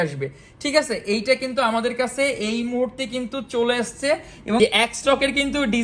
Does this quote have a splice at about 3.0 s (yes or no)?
no